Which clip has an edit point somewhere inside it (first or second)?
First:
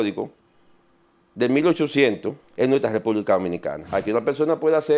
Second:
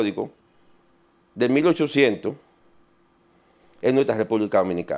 first